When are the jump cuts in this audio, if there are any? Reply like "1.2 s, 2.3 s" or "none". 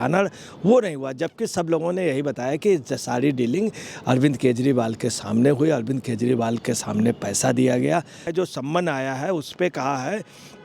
8.2 s